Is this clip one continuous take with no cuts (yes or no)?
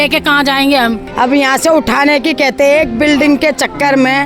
no